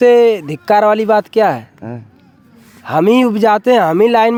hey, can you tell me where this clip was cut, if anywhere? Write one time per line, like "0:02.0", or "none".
none

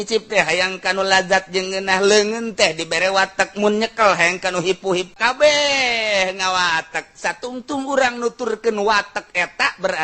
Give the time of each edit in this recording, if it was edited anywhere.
0:05.1

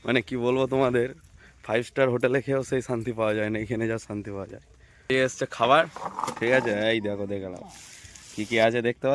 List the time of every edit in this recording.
0:05.1

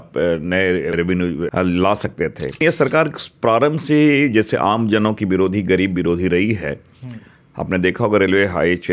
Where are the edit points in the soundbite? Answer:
0:01.1
0:02.6

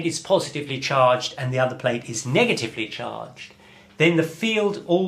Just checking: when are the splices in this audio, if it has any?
0:02.0

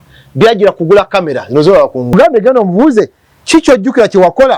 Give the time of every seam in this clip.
0:02.1

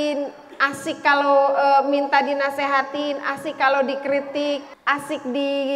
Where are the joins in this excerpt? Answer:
0:04.7

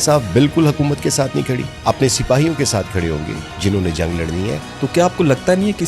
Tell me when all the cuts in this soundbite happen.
0:01.7
0:04.7

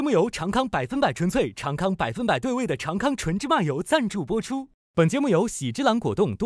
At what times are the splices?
none

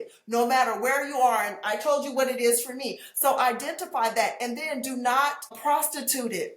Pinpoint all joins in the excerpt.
0:05.5

